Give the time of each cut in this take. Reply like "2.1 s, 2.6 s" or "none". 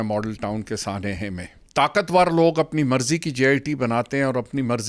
1.5 s